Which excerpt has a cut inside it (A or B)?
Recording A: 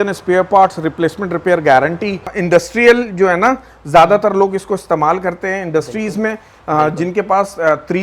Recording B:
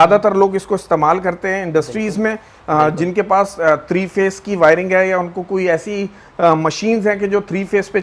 A